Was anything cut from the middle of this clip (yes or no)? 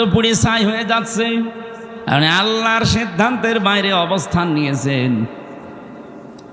yes